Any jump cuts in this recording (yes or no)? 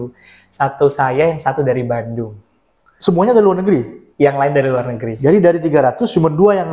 no